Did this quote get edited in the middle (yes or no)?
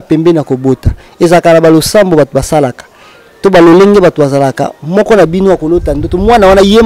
no